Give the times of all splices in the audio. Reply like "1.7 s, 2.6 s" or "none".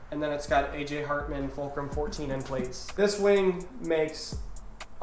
2.8 s